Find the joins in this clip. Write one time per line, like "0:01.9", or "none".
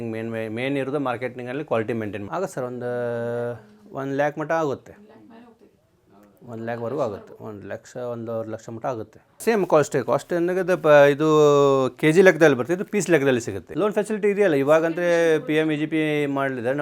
0:02.3
0:09.4
0:13.6